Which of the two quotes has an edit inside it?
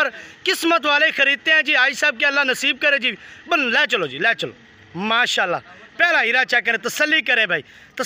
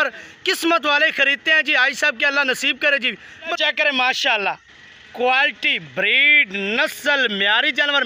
second; 1 cut; at 3.7 s

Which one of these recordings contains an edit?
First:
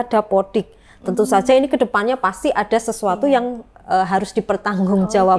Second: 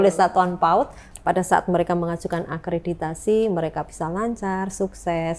second; 1 cut; at 1.1 s

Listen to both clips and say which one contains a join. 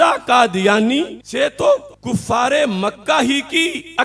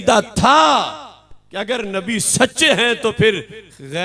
first; 2 cuts; at 1.2 s, 1.9 s

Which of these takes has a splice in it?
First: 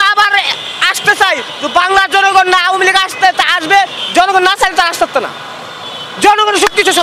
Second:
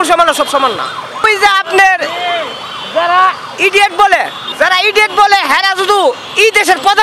second; 2 cuts; at 1.3 s, 4.4 s

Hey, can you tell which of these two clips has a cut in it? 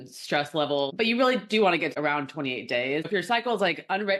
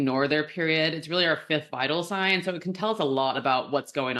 first; 3 cuts; at 0.9 s, 1.9 s, 3.1 s

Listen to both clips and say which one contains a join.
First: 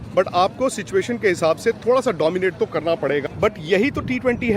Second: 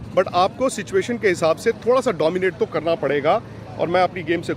first; 1 cut; at 3.2 s

